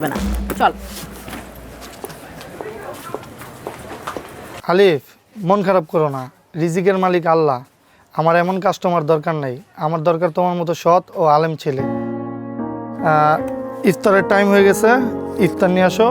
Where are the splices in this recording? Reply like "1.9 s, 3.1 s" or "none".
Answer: 4.5 s